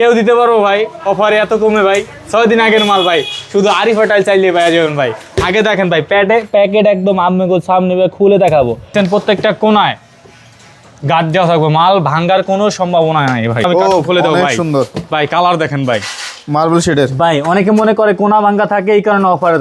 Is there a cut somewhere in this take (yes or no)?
yes